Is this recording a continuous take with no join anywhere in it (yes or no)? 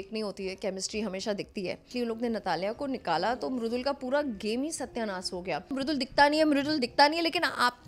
no